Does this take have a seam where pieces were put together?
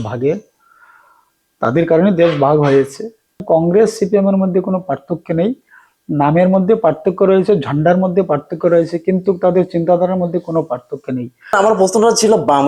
yes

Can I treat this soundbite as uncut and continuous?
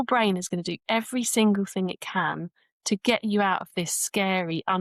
yes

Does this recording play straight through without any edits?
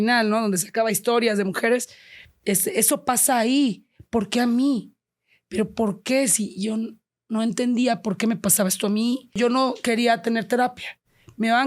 no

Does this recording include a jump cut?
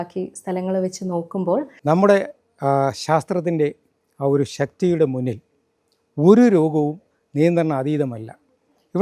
yes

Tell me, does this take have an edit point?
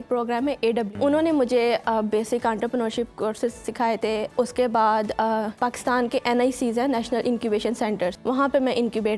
yes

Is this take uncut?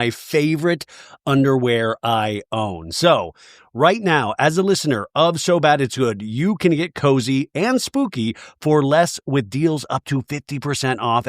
no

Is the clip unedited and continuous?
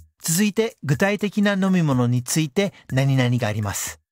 yes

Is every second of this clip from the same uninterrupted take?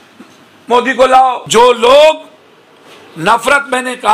no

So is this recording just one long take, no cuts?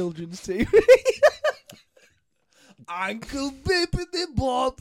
yes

